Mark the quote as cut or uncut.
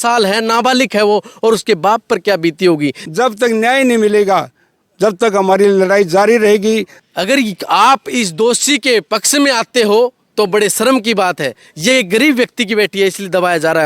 cut